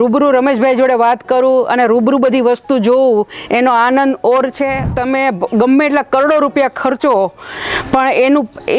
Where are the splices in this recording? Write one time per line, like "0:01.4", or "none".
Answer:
0:04.9